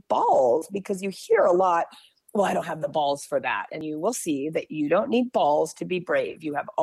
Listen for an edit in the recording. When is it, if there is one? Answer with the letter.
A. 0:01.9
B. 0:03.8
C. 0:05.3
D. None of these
B